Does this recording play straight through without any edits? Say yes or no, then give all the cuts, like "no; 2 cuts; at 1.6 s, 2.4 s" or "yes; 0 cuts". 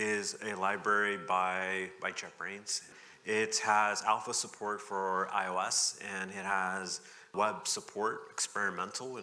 no; 2 cuts; at 2.9 s, 7.3 s